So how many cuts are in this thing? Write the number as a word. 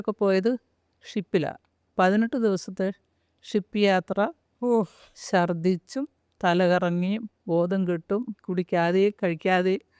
one